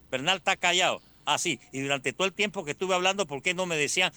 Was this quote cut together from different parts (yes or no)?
no